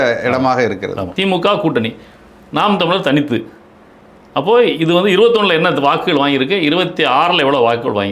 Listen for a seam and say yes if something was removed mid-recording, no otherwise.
yes